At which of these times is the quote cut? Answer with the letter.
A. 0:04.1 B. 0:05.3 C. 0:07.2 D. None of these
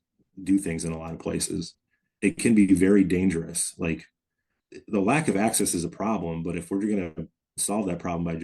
D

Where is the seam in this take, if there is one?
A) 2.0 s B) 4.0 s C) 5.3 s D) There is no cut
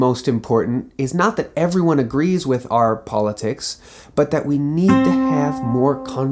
D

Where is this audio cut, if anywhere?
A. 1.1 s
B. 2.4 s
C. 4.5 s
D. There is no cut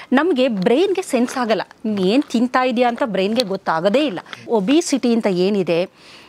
C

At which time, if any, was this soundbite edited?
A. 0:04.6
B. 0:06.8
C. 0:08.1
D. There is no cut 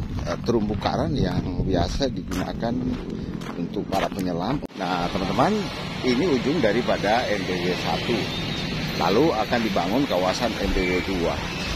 A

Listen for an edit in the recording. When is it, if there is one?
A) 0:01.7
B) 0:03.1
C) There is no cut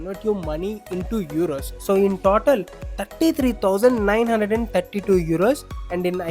A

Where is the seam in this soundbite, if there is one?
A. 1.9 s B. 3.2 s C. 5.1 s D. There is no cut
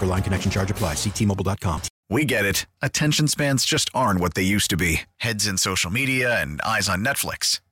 A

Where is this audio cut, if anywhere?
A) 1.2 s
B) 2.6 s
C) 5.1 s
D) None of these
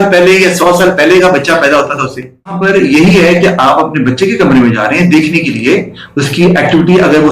B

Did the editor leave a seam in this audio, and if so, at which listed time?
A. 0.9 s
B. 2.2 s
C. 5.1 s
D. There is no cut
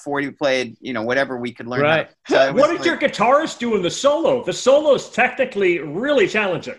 B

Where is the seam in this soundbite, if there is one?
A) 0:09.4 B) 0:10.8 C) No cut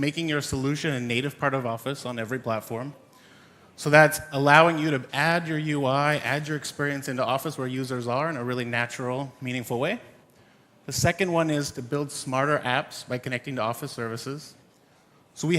B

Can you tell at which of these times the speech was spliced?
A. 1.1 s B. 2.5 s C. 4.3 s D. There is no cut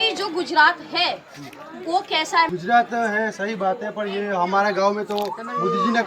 B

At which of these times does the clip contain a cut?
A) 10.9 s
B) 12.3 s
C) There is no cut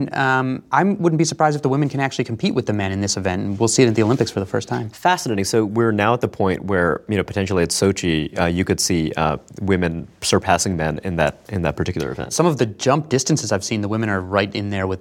B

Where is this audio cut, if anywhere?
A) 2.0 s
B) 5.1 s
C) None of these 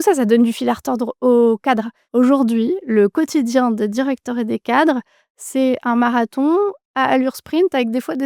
A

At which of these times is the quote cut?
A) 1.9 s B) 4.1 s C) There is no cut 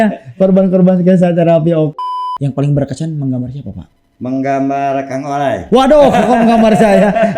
A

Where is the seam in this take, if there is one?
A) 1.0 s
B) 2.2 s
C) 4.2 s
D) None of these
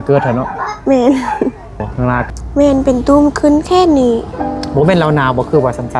B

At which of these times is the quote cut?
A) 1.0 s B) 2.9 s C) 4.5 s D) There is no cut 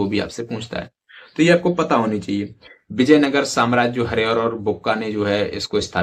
D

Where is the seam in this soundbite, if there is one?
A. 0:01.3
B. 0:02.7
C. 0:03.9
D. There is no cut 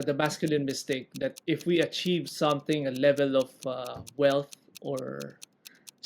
A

